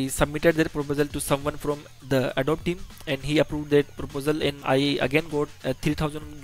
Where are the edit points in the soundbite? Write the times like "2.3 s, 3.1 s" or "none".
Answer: 2.3 s, 4.6 s

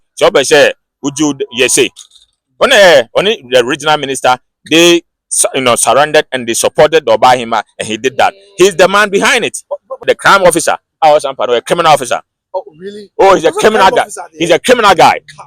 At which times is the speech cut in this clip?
10.1 s

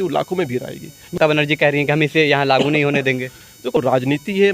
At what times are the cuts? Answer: 1.2 s, 3.8 s

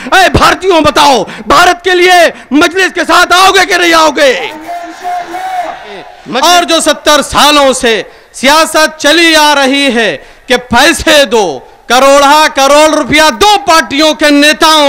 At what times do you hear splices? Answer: 6.2 s

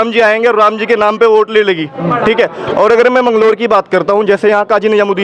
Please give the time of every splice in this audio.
none

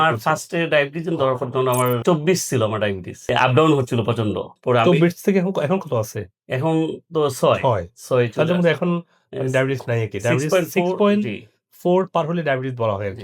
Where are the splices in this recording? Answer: 3.1 s, 4.5 s

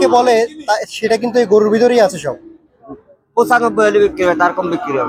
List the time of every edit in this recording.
2.8 s

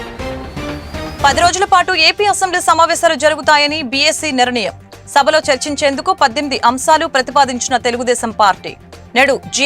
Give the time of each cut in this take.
1.1 s

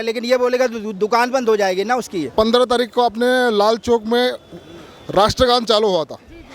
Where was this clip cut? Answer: 2.2 s

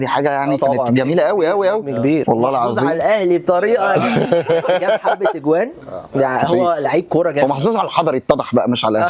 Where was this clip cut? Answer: none

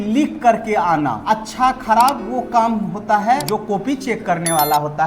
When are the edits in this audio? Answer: 1.2 s, 3.4 s

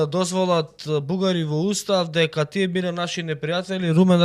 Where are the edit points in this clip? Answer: none

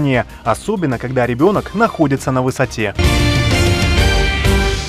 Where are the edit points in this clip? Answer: 3.0 s

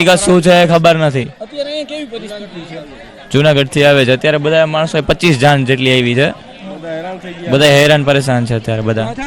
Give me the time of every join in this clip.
2.3 s

